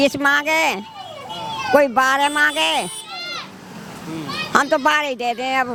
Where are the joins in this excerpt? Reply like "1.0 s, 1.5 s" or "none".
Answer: none